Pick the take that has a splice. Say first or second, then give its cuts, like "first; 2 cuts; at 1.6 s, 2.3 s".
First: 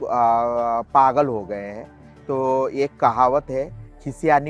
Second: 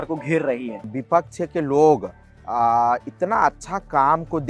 second; 1 cut; at 0.9 s